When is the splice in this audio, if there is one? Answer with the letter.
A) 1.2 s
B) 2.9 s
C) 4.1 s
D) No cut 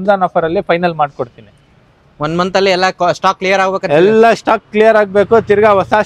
D